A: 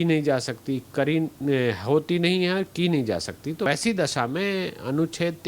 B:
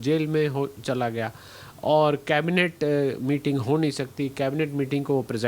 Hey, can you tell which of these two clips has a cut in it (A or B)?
A